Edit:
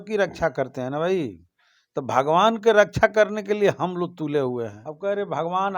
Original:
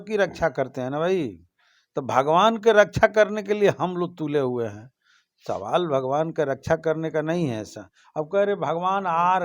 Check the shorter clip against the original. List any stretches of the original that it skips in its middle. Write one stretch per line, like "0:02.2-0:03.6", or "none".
0:04.8-0:08.1